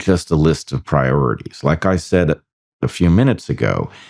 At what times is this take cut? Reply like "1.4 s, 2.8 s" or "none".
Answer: none